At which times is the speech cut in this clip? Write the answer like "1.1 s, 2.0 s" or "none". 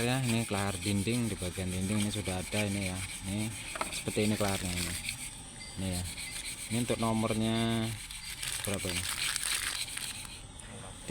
none